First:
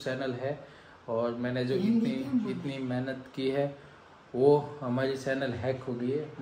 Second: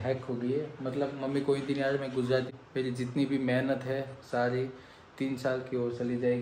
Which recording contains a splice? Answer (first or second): second